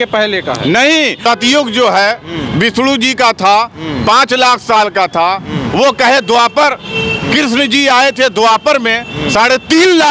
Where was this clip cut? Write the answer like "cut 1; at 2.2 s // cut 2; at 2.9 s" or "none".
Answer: cut 1; at 1.2 s